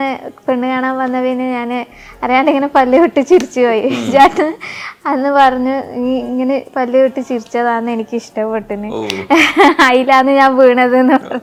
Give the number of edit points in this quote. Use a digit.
0